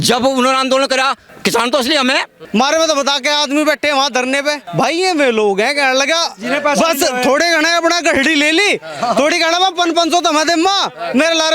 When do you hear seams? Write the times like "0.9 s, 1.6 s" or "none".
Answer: 1.3 s, 2.3 s, 4.6 s

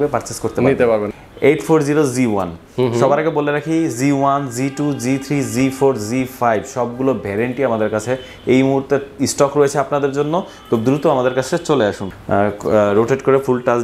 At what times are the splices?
1.1 s, 12.1 s

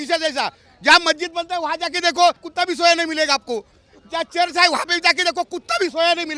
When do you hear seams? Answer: none

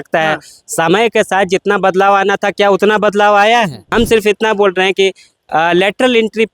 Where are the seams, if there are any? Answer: 3.8 s

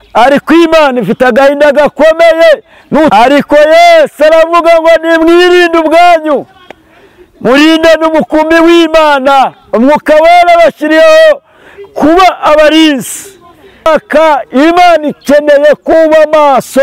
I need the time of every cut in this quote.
3.1 s, 13.9 s

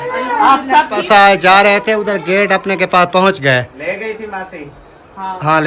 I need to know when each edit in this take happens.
1.0 s

